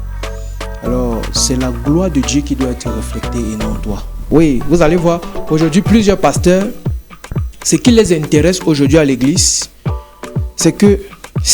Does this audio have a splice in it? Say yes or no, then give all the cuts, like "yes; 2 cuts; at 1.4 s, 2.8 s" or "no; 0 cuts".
yes; 1 cut; at 4.1 s